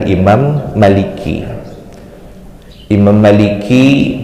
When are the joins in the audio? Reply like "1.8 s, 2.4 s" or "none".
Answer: none

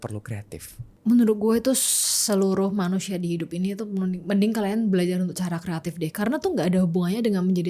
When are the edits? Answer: none

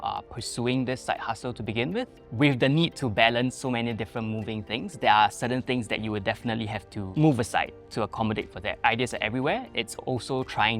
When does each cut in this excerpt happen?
2.2 s, 7.1 s, 8.8 s

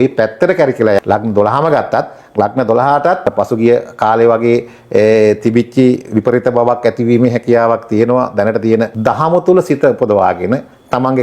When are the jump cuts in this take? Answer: 1.0 s, 3.3 s, 8.9 s

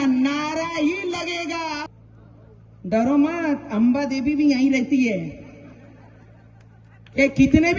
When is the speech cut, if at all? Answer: 2.0 s

